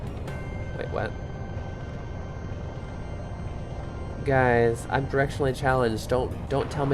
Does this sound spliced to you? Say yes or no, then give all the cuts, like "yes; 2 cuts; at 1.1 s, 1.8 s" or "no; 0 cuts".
no; 0 cuts